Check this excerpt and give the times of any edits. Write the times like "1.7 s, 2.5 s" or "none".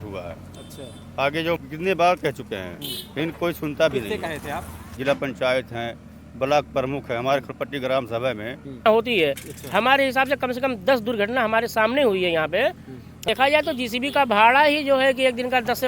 1.6 s, 4.9 s, 8.8 s, 13.3 s